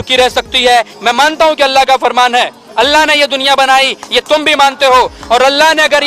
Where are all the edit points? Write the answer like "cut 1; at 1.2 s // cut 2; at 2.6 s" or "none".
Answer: cut 1; at 0.9 s